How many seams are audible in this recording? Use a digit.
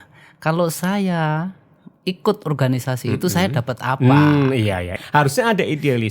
1